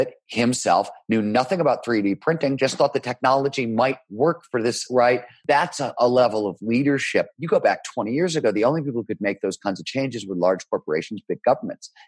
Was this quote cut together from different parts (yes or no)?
yes